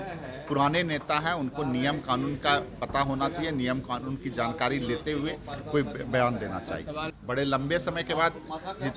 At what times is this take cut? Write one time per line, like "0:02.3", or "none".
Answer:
0:07.1